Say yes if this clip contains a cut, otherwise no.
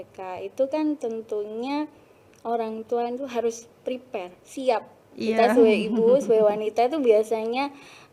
yes